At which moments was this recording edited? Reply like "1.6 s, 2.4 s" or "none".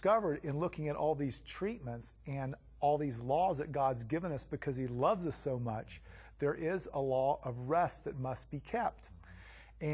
3.3 s